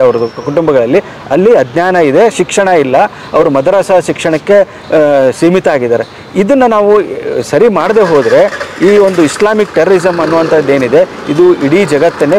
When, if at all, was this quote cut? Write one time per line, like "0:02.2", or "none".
none